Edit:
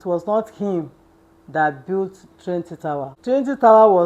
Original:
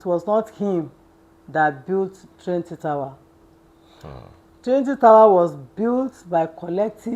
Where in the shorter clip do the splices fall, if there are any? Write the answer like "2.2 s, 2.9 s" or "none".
3.1 s